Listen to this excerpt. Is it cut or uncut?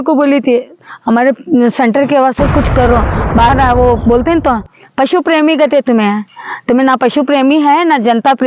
cut